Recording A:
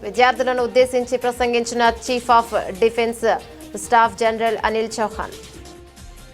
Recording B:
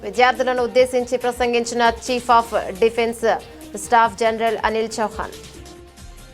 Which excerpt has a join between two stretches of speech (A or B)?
B